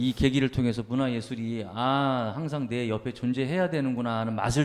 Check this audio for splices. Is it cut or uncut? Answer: uncut